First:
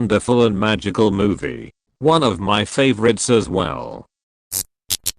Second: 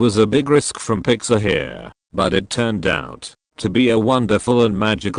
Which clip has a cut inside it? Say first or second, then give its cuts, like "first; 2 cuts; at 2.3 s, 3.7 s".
first; 1 cut; at 4.2 s